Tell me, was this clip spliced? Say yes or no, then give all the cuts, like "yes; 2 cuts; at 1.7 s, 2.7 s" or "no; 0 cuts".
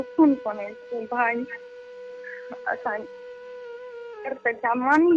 no; 0 cuts